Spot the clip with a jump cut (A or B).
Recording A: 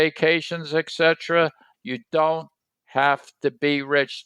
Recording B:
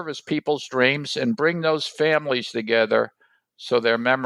A